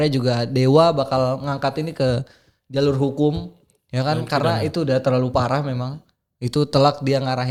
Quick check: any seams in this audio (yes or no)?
no